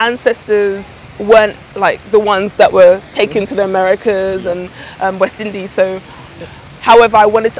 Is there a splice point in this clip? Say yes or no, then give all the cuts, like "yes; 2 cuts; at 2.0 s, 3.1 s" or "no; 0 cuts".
yes; 1 cut; at 6.2 s